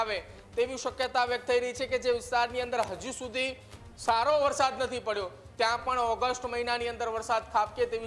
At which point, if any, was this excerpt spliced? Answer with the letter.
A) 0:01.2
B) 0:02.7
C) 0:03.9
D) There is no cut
D